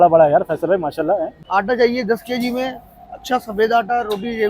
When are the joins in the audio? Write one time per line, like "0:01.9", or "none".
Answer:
0:01.4